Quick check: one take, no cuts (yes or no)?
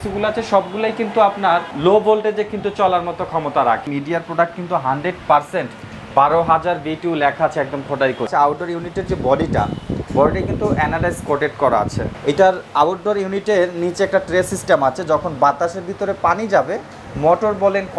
no